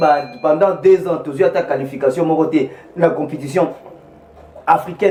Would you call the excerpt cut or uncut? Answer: uncut